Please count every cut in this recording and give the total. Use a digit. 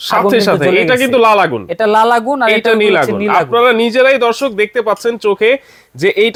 0